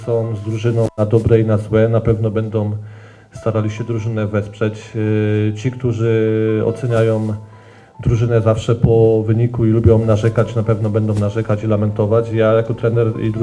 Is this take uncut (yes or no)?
yes